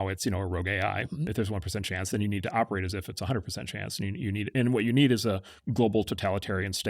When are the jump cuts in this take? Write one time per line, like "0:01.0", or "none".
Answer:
0:01.3